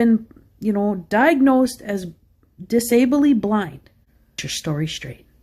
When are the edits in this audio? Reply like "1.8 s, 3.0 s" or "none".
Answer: 3.6 s